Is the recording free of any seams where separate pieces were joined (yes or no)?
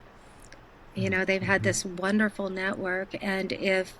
yes